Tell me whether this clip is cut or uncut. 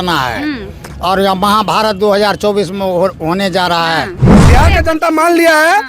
cut